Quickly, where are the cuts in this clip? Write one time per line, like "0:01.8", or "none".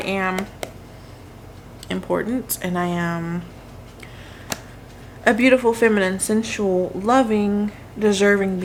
none